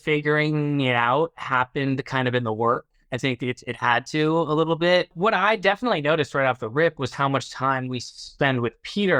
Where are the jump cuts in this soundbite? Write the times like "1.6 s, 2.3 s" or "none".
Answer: 5.1 s